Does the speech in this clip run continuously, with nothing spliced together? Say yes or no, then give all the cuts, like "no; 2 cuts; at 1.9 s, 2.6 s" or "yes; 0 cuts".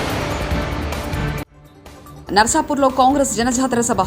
yes; 0 cuts